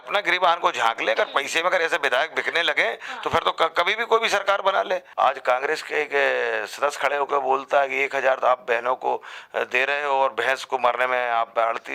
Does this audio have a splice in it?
yes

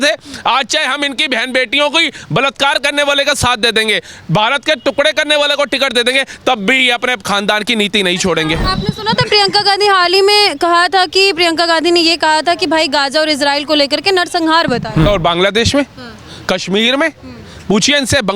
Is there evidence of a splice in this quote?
yes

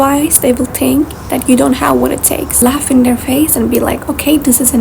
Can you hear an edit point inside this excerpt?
yes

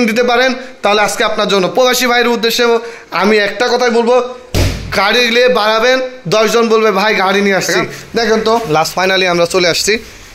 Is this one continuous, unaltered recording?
no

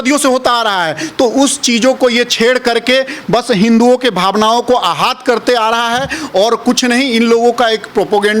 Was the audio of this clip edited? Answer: no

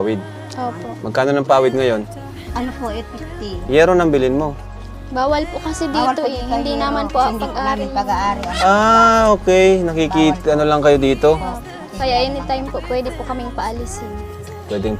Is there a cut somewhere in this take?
no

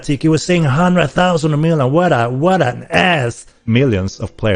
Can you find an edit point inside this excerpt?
yes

